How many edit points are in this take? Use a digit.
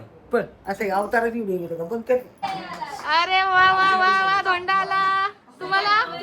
1